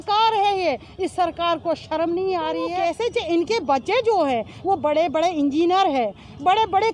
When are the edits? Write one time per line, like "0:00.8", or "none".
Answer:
0:02.7